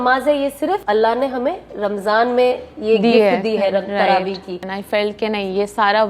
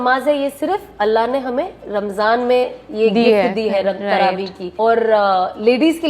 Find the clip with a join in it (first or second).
first